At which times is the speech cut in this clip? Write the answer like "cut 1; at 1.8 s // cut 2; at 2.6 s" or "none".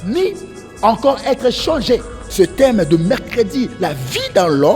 cut 1; at 2.2 s